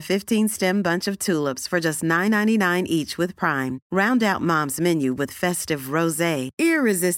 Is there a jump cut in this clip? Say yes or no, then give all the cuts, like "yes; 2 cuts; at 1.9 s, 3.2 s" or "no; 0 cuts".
no; 0 cuts